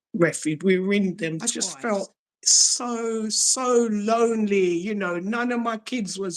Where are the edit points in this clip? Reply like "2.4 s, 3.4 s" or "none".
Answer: 1.5 s